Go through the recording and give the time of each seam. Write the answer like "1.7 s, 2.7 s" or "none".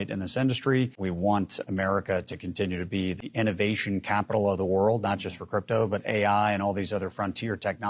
1.0 s, 3.2 s